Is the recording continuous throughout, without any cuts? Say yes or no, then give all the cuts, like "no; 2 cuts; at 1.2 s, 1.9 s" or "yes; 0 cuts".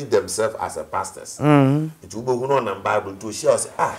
yes; 0 cuts